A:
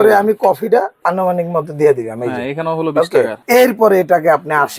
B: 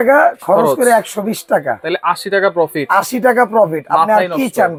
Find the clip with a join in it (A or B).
A